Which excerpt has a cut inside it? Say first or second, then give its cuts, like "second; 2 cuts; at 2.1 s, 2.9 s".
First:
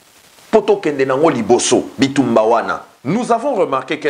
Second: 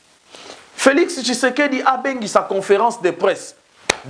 first; 1 cut; at 2.9 s